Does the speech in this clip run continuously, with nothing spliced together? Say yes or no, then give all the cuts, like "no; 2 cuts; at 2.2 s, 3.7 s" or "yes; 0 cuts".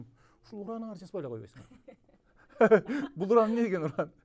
yes; 0 cuts